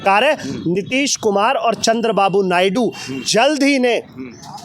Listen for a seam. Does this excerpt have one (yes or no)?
no